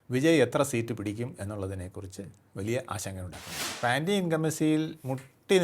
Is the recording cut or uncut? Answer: cut